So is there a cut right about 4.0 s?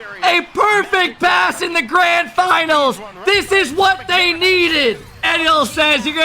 no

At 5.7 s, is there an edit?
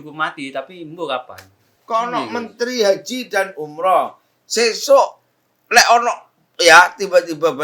no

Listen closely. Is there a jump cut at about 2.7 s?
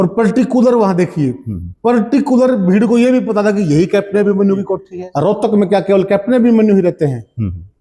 no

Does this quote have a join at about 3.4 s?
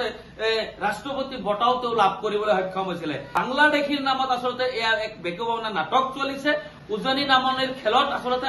yes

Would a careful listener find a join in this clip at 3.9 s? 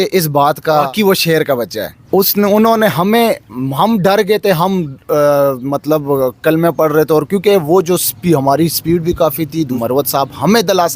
no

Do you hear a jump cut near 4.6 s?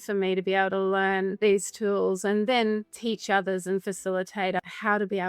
yes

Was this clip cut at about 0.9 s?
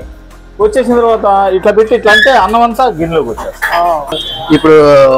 no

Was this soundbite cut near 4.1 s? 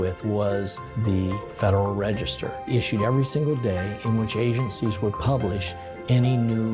no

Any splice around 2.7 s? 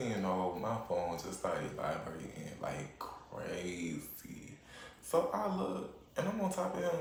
no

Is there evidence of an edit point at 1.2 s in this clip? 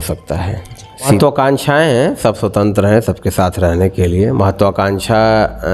yes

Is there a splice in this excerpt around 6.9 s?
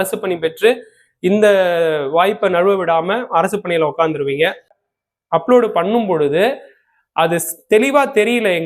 no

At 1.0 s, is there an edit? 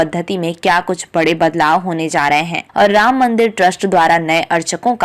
no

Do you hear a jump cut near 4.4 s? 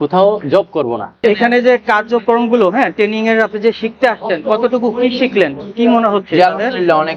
no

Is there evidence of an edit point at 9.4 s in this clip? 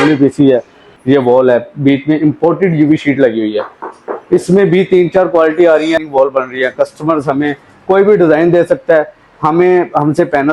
no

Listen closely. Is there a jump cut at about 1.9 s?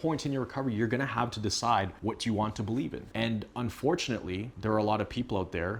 yes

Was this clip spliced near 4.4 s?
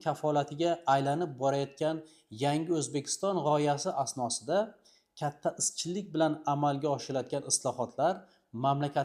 no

